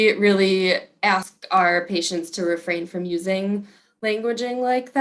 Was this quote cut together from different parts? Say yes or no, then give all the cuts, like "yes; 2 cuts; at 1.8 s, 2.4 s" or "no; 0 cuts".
yes; 1 cut; at 1.3 s